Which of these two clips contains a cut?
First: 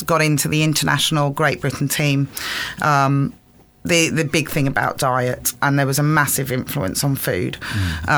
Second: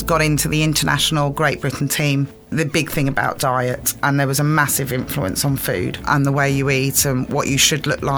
second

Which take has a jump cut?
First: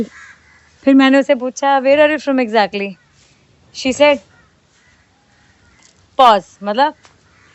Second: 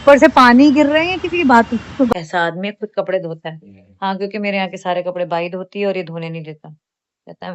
second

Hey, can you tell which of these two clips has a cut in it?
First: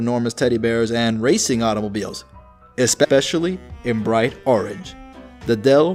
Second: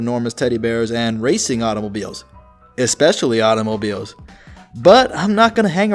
second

